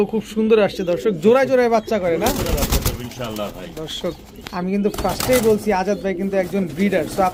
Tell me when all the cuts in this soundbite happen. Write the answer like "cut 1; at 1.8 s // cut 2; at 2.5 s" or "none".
none